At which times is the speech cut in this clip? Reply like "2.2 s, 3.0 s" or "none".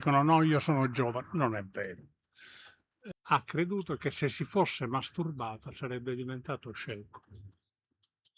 3.1 s